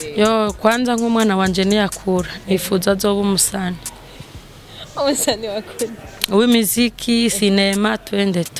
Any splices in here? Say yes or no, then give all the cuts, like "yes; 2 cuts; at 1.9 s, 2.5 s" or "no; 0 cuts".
no; 0 cuts